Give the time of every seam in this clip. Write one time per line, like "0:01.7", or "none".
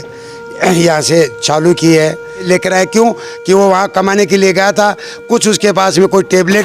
0:02.8

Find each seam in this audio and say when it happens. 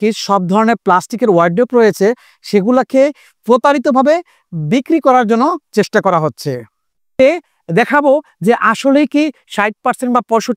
0:07.2

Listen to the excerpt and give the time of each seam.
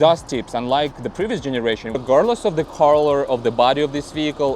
0:02.0

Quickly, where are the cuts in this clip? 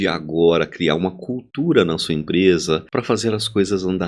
0:02.9

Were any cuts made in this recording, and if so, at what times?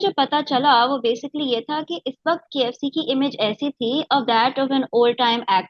none

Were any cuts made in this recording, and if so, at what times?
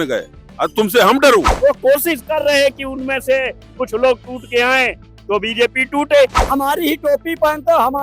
0:01.5
0:06.4

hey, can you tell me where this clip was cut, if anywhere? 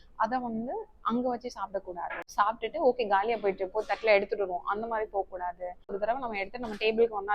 0:02.2
0:06.0

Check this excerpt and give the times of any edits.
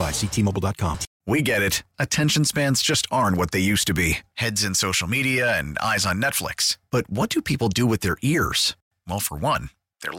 0:01.1

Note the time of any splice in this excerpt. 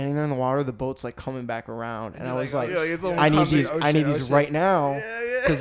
none

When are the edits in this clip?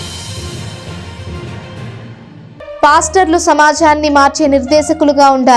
0:02.4

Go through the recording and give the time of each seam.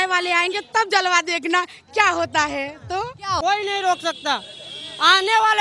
0:03.4

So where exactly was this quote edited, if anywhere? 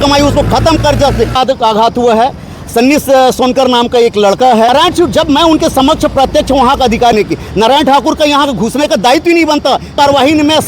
0:01.4
0:04.7
0:07.1
0:09.9

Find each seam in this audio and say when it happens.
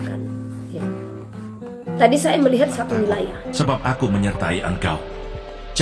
0:03.4

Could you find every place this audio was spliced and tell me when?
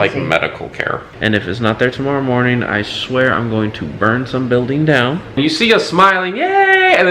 0:01.1
0:05.4

